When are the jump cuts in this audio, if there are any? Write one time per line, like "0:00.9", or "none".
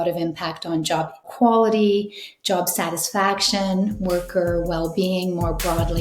0:01.3